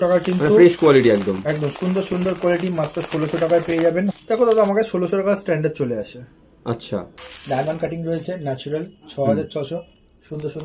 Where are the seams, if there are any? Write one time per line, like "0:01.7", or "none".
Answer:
0:04.1
0:07.1

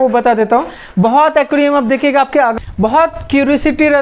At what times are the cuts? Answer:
0:02.5

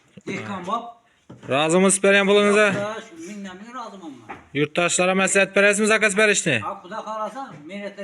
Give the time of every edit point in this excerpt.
none

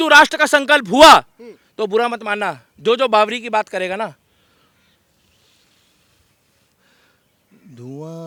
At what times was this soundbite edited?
none

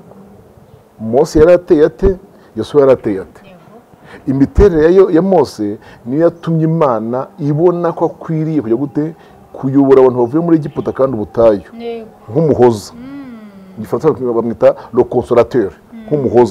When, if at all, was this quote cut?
none

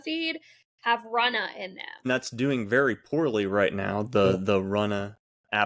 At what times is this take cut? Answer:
0:02.1

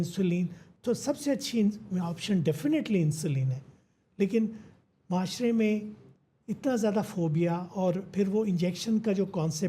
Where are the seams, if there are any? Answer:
none

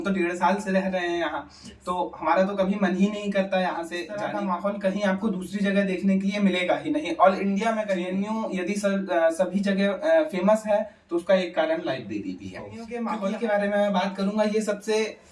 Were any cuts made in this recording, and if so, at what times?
0:04.2
0:08.1
0:12.9

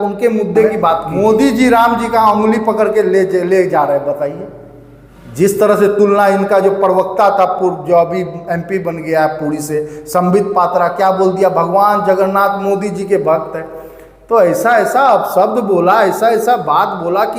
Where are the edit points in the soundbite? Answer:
0:01.1

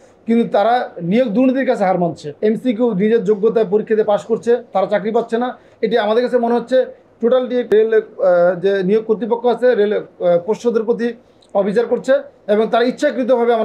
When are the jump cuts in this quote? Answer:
0:02.3
0:07.7

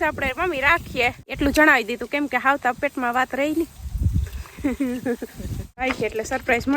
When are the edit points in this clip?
0:01.2
0:05.8

